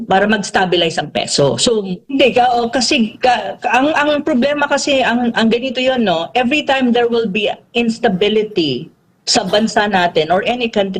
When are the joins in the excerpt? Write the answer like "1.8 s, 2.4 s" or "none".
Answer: 2.0 s